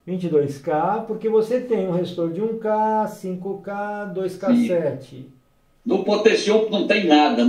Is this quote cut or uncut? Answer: uncut